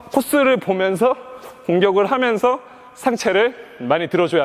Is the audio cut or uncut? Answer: uncut